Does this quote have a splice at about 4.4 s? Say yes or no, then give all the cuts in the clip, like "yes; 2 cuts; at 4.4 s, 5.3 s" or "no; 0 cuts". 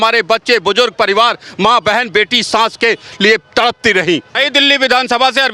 yes; 1 cut; at 4.4 s